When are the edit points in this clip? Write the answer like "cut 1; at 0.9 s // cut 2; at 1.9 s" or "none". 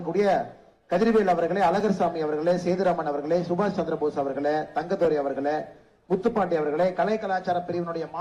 none